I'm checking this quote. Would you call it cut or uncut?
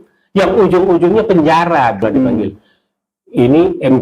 cut